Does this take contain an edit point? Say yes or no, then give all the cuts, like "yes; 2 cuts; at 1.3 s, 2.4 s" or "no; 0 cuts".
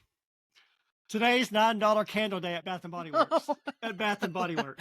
yes; 1 cut; at 2.6 s